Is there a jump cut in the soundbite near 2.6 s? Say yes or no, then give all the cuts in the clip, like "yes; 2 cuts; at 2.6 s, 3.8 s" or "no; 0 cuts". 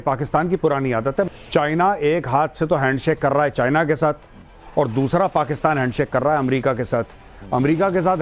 no; 1 cut; at 1.3 s